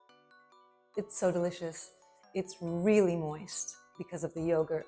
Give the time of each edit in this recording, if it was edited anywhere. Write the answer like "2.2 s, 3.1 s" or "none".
0.9 s